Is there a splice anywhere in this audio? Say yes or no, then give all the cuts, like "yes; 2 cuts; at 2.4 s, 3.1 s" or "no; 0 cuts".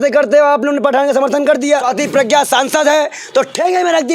yes; 1 cut; at 1.9 s